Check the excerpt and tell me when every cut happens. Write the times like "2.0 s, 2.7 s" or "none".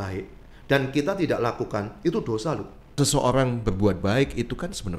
3.0 s